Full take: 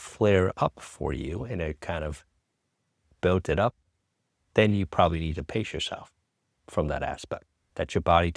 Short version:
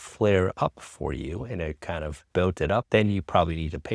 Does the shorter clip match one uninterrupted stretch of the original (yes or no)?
no